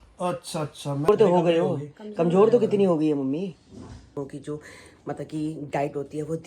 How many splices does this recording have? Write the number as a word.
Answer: two